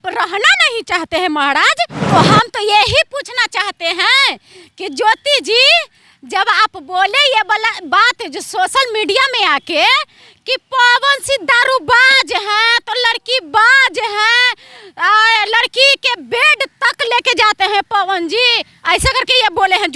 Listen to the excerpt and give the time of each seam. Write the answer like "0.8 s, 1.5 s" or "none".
2.0 s